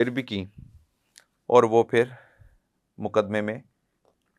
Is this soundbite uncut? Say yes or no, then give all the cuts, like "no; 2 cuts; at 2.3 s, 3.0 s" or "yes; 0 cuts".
yes; 0 cuts